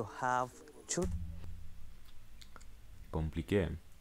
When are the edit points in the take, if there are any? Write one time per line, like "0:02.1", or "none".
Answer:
0:01.4